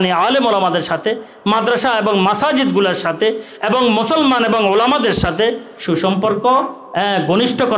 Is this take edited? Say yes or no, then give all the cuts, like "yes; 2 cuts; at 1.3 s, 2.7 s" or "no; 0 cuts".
no; 0 cuts